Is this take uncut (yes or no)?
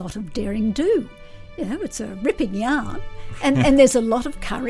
no